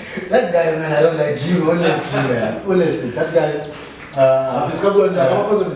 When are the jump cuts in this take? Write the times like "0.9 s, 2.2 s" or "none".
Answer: none